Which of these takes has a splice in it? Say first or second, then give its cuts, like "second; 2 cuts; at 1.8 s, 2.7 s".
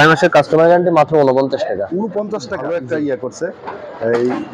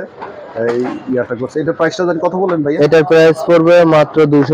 first; 1 cut; at 2.5 s